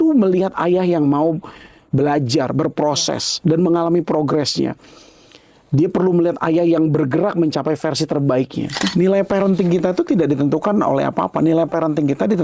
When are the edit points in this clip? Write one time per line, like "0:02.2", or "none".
0:08.9